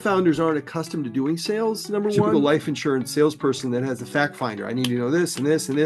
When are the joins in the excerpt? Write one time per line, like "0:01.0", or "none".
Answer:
0:02.3

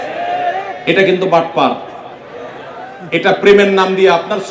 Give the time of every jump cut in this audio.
none

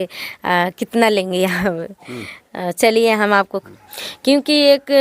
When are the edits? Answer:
0:03.6

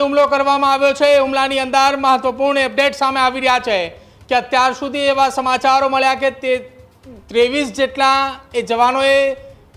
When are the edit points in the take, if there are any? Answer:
none

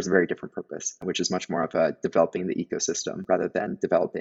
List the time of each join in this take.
none

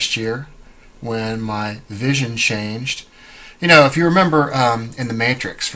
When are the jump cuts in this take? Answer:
0:01.8

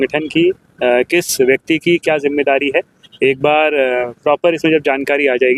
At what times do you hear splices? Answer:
none

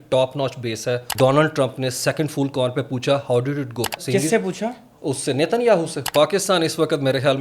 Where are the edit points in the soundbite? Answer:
0:01.1
0:04.0
0:06.0

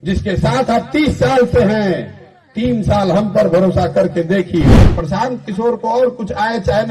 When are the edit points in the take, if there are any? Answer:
0:04.8

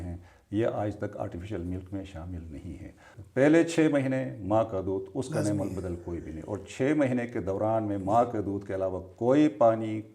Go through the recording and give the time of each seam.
0:03.1

